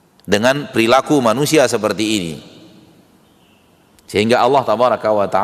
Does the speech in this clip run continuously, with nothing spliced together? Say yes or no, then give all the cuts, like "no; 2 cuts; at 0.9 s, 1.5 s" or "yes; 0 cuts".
yes; 0 cuts